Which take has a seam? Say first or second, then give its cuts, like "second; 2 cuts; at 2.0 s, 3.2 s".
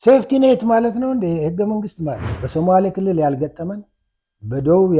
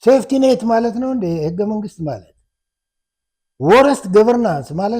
first; 1 cut; at 2.3 s